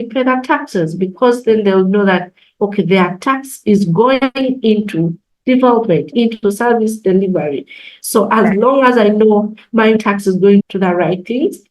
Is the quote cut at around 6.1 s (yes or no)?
yes